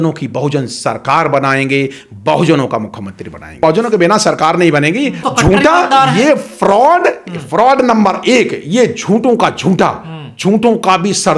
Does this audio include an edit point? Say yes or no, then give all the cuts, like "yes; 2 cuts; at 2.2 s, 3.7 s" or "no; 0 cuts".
yes; 2 cuts; at 3.6 s, 5.3 s